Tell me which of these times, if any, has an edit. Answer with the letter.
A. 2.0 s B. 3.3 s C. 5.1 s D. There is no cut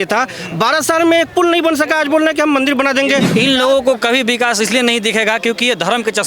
B